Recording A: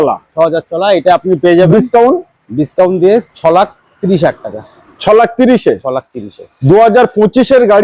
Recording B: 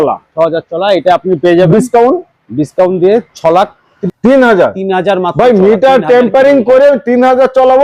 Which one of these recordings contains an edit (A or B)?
B